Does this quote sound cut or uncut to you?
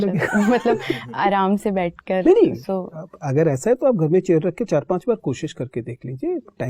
uncut